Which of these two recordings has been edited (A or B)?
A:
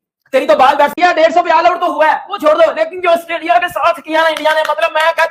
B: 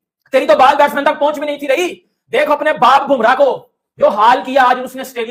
A